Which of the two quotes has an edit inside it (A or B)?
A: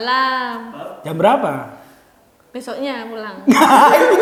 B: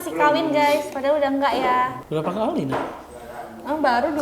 B